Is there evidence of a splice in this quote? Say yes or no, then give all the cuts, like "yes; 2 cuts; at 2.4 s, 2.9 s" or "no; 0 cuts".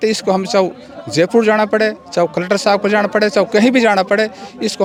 no; 0 cuts